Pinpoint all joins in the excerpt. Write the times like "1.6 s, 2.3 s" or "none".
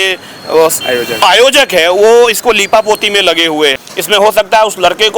3.8 s